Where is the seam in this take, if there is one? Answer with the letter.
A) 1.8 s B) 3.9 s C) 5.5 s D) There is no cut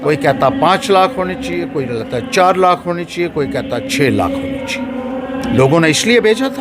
C